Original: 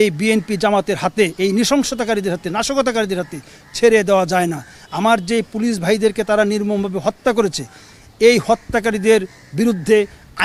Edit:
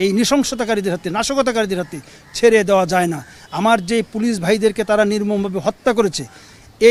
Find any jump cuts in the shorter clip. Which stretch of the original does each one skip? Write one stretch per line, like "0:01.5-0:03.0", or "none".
none